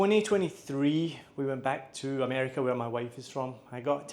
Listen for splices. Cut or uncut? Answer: uncut